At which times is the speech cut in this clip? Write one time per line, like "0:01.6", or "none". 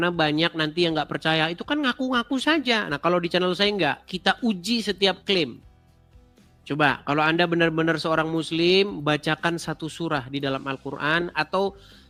none